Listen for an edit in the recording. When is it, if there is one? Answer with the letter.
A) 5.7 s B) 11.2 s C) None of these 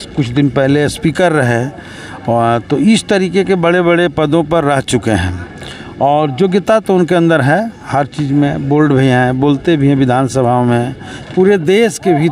B